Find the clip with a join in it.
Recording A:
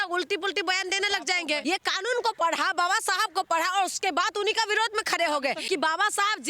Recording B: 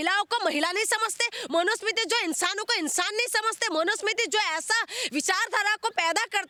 A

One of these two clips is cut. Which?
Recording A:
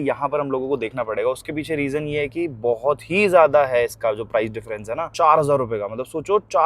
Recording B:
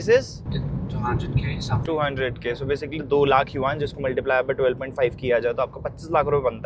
A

